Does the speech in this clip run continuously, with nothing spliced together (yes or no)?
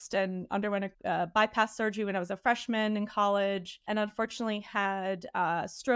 no